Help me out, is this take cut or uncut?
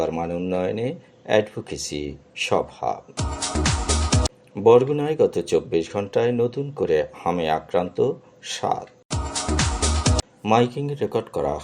cut